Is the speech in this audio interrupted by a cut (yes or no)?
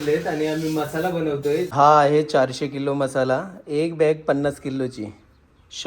yes